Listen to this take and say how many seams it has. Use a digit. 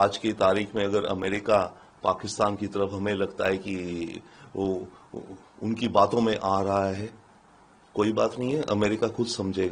0